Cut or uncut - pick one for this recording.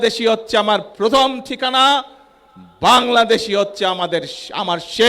uncut